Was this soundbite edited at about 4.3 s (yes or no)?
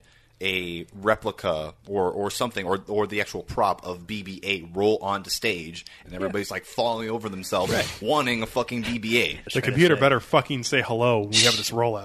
no